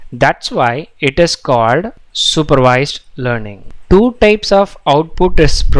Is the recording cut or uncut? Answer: cut